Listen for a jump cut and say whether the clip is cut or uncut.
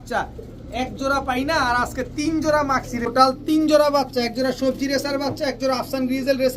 cut